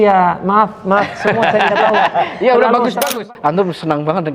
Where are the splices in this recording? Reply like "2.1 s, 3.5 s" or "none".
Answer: 3.2 s